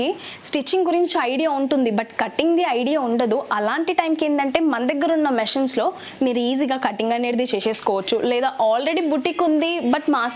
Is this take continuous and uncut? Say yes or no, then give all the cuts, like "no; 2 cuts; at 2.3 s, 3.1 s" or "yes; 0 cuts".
yes; 0 cuts